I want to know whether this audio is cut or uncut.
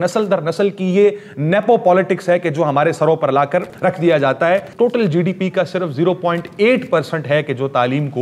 cut